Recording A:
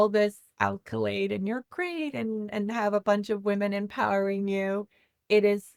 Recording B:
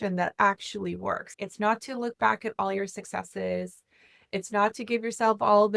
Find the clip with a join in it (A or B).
B